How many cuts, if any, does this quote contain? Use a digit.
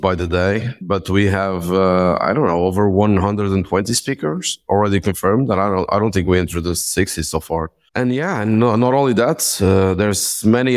1